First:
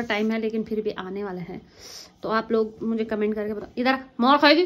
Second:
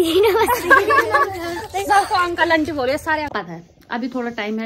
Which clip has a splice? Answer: second; 1 cut; at 3.3 s

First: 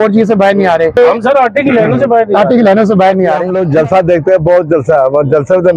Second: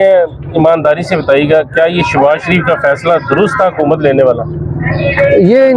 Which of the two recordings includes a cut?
first; 1 cut; at 3.5 s

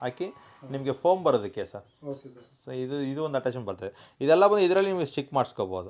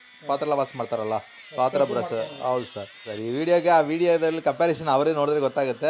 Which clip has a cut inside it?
second; 1 cut; at 3.1 s

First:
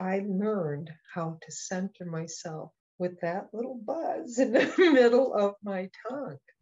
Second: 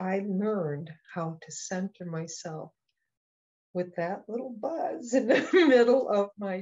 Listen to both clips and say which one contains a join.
first; 1 cut; at 2.8 s

